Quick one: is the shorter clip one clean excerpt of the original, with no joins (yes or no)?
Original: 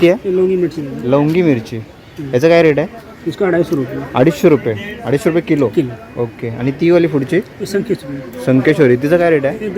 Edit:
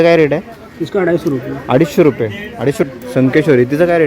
no